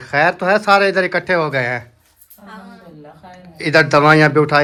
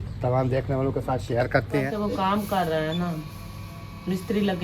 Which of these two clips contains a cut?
second; 1 cut; at 1.9 s

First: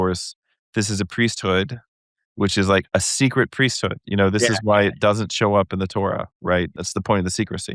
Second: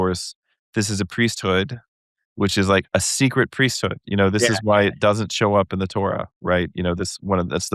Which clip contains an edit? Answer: first; 1 cut; at 6.8 s

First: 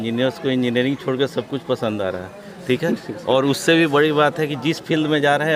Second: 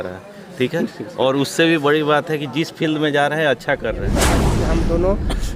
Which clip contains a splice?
second; 1 cut; at 4.5 s

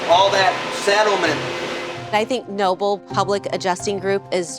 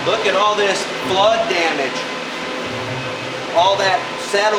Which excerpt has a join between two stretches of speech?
first; 1 cut; at 2.0 s

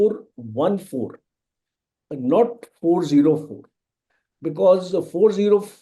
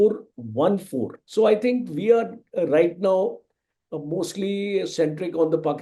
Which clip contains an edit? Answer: second; 1 cut; at 1.2 s

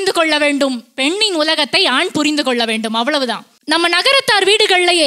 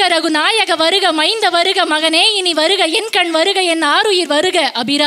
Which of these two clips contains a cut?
first; 1 cut; at 3.5 s

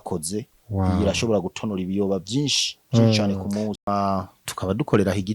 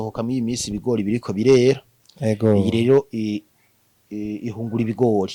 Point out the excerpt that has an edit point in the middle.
first; 1 cut; at 3.8 s

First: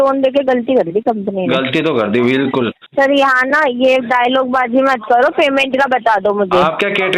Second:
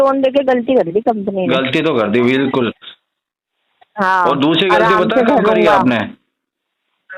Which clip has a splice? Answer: first; 1 cut; at 2.8 s

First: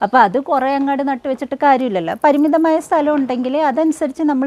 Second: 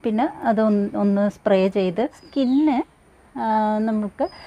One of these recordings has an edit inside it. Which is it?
second; 1 cut; at 2.2 s

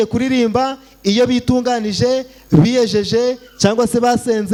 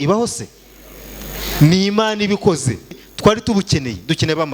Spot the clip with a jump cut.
second; 1 cut; at 3.0 s

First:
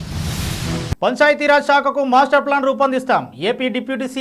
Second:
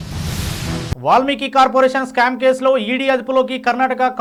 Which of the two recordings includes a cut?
first; 1 cut; at 0.9 s

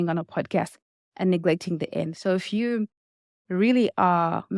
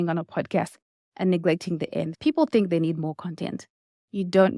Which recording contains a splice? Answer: second; 1 cut; at 2.1 s

